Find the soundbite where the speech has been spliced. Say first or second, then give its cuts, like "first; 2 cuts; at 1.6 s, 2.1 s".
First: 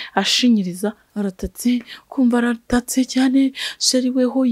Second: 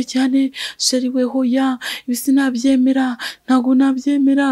first; 1 cut; at 1.0 s